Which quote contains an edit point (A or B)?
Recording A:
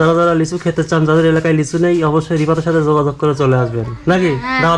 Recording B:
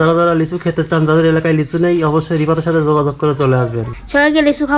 B